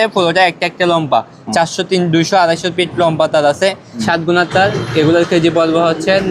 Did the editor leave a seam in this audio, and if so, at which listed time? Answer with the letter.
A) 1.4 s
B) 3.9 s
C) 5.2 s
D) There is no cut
B